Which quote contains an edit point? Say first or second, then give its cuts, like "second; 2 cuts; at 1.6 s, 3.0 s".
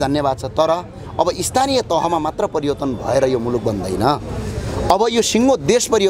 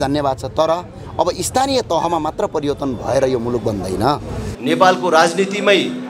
second; 1 cut; at 4.5 s